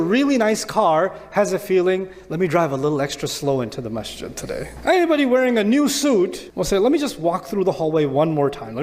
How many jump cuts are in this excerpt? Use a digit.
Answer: 2